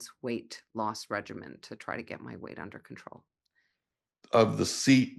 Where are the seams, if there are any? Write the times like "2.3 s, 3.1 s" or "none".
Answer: 4.2 s

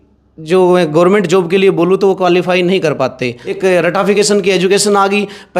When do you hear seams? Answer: 3.4 s

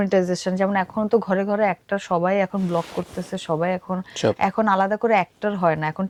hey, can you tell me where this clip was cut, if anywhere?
none

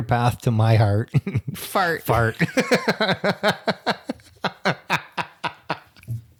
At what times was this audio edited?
none

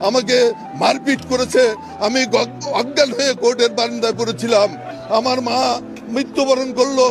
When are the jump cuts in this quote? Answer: 4.9 s

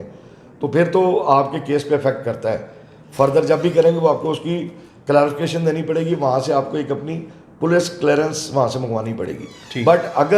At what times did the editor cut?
none

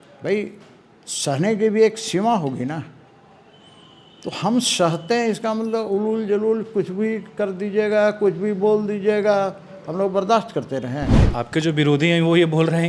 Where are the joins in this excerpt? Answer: 11.2 s

